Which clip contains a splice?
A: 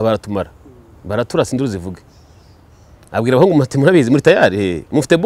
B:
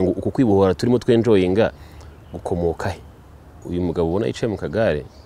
B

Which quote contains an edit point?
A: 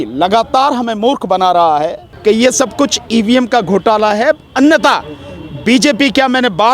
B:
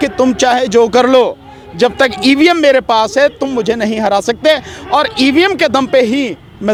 A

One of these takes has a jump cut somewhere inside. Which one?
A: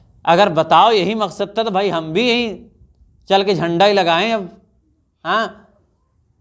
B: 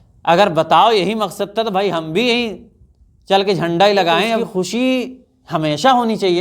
B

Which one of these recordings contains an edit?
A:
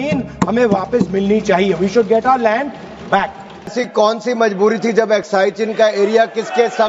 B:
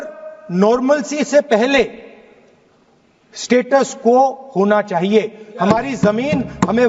A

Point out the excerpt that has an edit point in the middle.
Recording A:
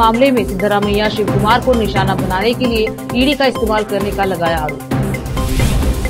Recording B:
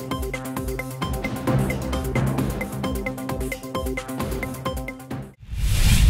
B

